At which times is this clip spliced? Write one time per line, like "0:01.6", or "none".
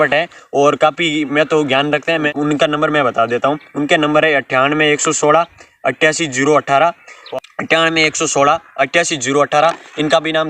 0:02.3
0:07.1